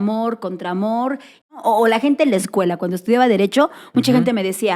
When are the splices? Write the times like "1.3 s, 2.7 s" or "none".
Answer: 1.3 s